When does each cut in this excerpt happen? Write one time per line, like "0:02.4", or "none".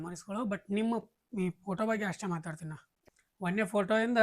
0:02.9